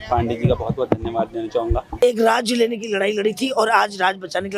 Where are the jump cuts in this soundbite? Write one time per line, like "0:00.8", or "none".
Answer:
0:02.0